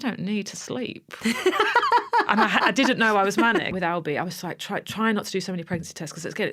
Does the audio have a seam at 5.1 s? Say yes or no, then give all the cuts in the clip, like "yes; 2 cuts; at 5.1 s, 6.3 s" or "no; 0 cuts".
no; 1 cut; at 3.7 s